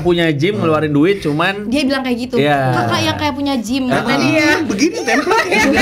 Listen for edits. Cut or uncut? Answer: uncut